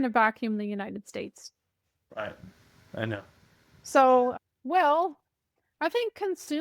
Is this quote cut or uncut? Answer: uncut